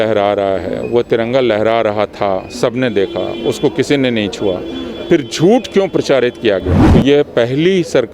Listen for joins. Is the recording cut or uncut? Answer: cut